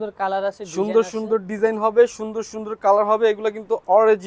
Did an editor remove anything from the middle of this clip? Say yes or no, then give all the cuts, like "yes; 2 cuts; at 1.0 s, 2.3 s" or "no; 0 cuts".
no; 0 cuts